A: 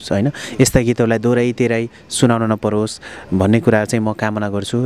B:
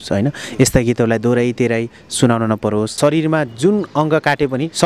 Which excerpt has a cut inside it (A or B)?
B